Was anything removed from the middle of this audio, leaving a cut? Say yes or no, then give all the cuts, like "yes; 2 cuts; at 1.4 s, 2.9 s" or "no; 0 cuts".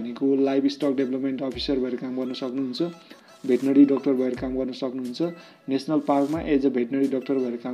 no; 0 cuts